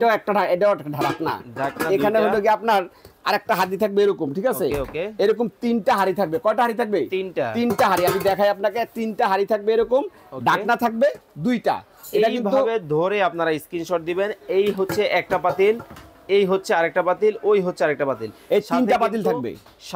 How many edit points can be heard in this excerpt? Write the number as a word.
zero